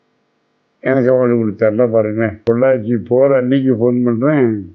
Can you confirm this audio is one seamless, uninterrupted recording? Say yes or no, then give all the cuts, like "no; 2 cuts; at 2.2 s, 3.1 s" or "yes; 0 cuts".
no; 1 cut; at 2.4 s